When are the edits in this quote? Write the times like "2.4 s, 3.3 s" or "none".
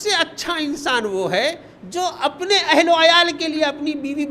none